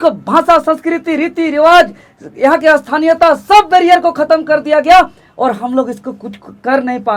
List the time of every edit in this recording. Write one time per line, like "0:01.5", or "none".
none